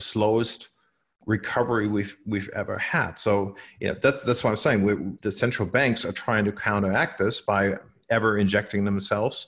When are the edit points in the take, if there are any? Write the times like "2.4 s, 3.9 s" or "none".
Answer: 5.2 s, 7.9 s